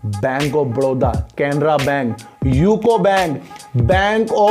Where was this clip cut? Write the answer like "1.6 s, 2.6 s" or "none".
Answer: none